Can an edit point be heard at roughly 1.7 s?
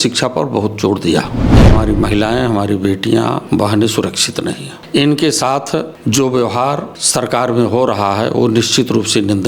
yes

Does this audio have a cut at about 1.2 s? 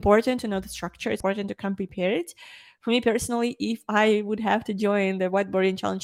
yes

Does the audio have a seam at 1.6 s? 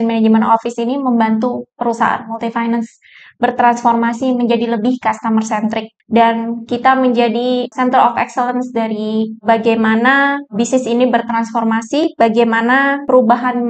no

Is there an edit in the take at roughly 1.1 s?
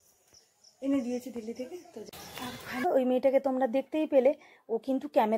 no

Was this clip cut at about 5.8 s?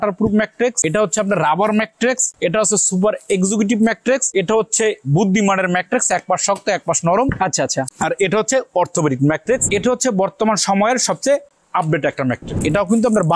no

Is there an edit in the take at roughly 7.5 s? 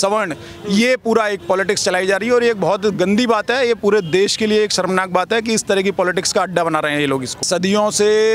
yes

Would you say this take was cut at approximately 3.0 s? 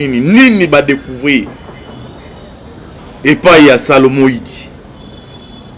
yes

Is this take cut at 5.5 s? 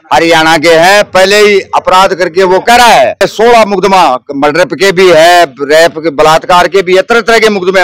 no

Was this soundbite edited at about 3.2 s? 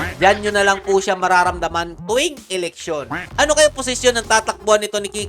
yes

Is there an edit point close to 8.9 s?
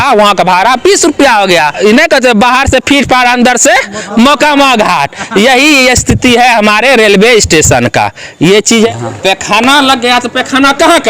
yes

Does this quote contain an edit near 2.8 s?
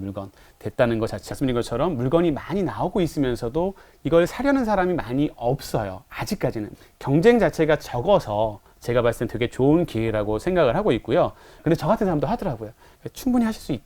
no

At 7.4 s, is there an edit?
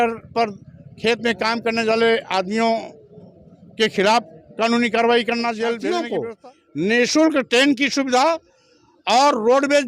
no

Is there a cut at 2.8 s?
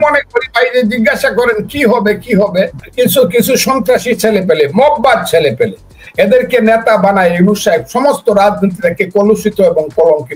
yes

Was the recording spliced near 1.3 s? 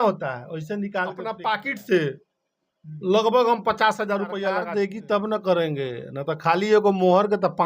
yes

